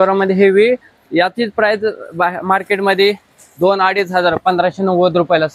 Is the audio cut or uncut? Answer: uncut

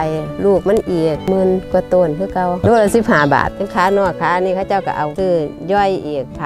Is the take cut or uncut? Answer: cut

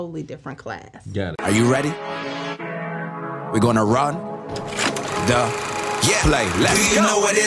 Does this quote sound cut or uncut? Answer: cut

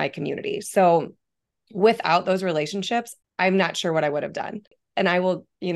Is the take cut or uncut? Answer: cut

